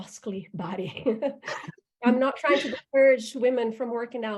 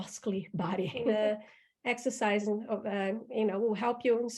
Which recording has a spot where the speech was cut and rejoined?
second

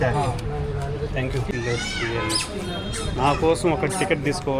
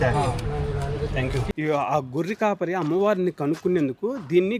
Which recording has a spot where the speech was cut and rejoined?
second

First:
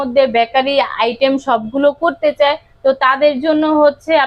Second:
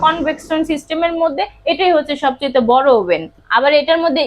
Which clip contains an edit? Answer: second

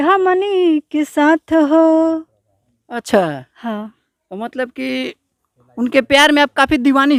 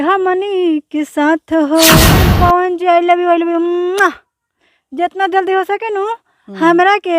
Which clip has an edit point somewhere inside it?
second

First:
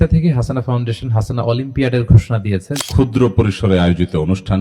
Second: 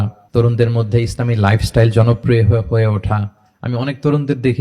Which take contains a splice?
first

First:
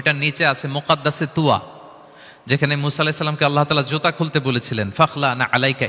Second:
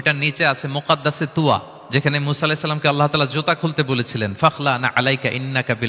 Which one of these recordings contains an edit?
second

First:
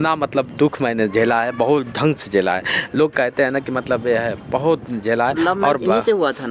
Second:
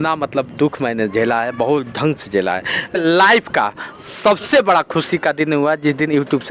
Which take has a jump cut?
second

